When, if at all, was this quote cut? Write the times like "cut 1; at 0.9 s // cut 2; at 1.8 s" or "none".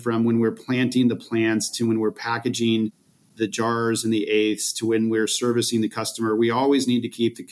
cut 1; at 3.1 s